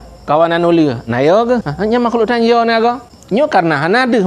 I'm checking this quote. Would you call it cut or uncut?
cut